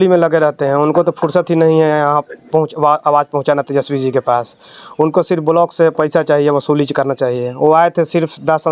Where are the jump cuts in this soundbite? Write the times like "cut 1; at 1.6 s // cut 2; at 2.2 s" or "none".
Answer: none